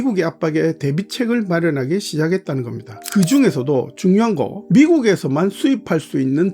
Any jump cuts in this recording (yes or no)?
yes